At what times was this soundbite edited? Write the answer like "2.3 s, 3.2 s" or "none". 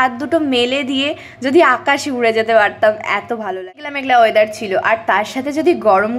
3.9 s